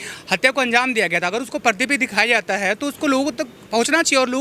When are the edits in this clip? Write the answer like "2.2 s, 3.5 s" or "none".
none